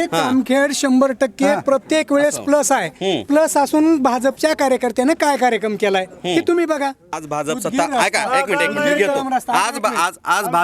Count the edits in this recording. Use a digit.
1